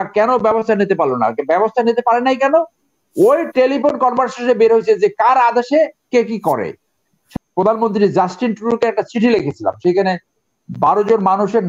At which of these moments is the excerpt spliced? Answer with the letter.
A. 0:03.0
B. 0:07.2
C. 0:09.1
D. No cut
B